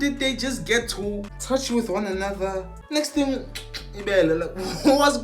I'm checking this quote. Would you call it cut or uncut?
cut